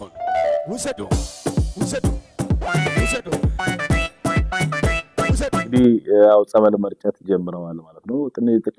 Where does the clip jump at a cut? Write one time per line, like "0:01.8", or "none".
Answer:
0:05.7